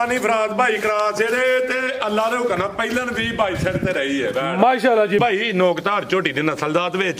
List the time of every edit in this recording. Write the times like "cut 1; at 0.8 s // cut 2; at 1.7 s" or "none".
cut 1; at 5.2 s